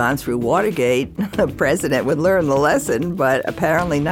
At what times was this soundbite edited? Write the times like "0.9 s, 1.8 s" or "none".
none